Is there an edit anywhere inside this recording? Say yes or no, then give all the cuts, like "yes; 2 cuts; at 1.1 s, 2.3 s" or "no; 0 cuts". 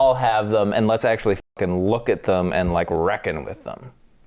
no; 0 cuts